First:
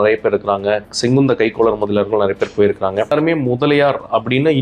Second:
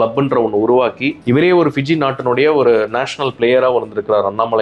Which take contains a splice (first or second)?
first